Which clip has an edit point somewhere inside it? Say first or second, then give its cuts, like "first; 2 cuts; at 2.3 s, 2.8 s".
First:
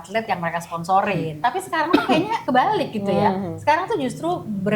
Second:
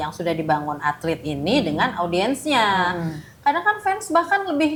first; 2 cuts; at 1.3 s, 2.4 s